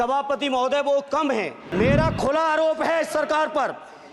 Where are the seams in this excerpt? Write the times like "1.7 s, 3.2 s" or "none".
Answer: 1.6 s